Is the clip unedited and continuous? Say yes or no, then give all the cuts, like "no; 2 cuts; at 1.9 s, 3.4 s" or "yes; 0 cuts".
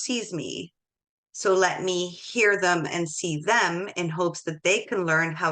yes; 0 cuts